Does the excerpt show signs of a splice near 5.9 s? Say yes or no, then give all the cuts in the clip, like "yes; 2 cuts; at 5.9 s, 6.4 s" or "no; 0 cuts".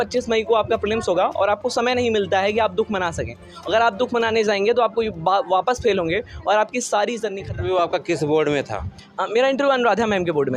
no; 1 cut; at 7.4 s